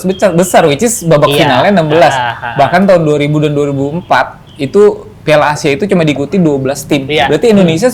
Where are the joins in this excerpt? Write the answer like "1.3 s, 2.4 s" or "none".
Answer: none